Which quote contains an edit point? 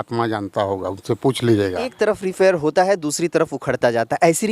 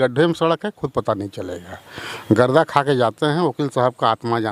first; 1 cut; at 1.9 s

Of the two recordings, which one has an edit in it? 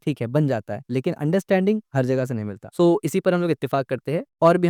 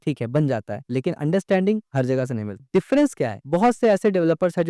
second; 1 cut; at 2.5 s

